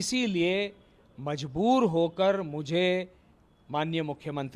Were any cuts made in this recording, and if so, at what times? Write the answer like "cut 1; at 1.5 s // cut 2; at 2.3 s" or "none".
none